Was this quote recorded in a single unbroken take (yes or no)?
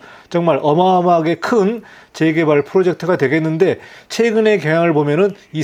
yes